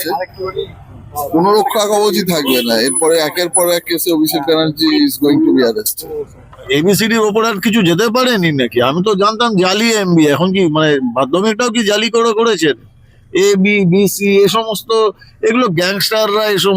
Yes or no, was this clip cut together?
yes